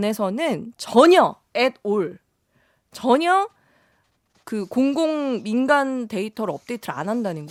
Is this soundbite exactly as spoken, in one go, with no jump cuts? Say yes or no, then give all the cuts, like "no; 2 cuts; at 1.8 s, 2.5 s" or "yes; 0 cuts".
yes; 0 cuts